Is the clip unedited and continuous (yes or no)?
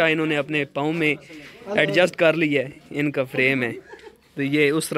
yes